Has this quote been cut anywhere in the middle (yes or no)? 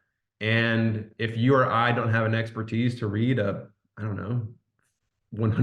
no